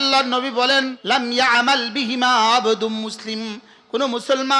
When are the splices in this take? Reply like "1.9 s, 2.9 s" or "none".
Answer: 1.0 s